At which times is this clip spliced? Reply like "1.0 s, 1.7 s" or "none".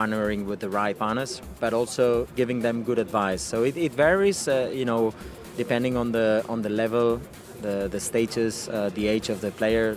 1.0 s, 2.3 s